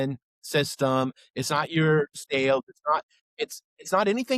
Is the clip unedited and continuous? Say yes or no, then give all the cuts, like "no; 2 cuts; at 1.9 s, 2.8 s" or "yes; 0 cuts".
no; 1 cut; at 2.2 s